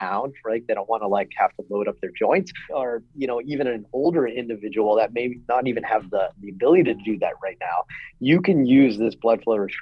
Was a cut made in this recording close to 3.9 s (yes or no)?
no